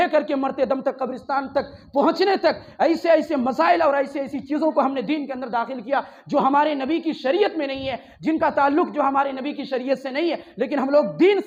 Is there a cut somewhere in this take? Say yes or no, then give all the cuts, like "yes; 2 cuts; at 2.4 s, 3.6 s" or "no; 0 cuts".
no; 0 cuts